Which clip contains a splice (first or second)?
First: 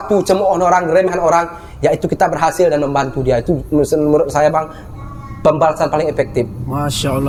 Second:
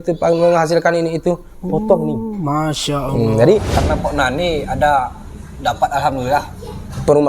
second